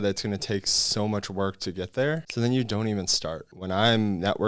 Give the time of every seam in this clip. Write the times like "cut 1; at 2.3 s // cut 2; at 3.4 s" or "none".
cut 1; at 2.3 s // cut 2; at 3.5 s